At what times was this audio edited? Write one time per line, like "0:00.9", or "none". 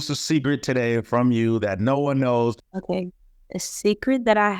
0:02.7